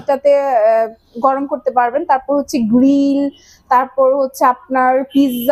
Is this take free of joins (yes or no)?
yes